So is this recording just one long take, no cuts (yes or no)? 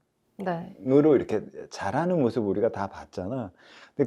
yes